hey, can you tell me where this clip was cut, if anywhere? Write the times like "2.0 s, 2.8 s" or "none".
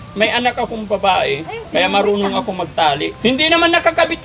3.1 s

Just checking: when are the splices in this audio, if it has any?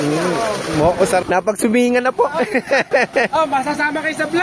1.2 s

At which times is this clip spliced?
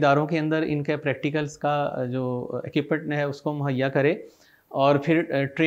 none

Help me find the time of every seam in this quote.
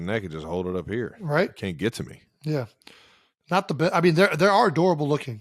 none

